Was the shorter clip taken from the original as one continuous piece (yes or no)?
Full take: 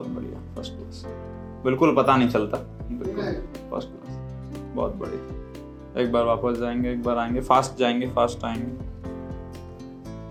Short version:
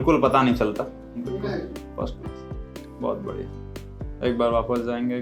yes